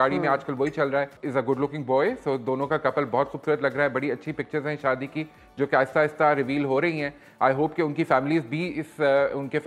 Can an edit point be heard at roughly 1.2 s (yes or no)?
yes